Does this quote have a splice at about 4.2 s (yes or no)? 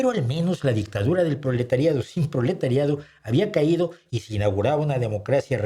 no